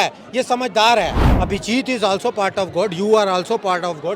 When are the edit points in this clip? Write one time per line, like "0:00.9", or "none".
0:01.2